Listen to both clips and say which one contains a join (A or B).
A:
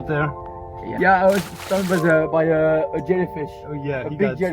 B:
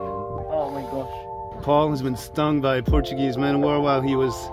A